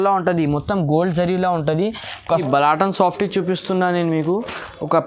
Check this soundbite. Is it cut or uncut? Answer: cut